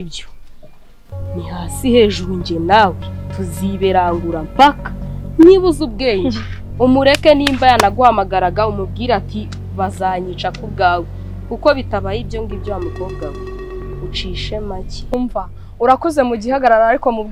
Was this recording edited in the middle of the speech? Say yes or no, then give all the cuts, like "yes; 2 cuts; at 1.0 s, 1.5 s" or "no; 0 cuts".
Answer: no; 0 cuts